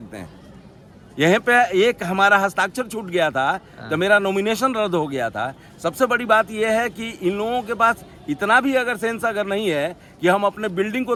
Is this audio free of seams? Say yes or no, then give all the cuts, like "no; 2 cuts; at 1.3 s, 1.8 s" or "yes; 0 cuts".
yes; 0 cuts